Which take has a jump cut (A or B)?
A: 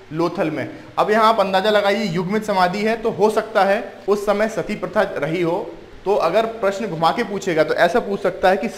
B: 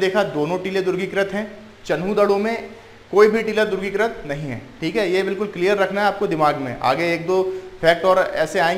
A